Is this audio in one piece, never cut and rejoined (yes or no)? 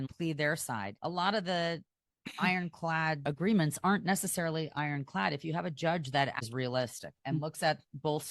no